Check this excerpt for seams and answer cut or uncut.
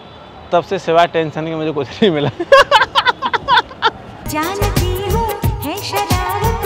uncut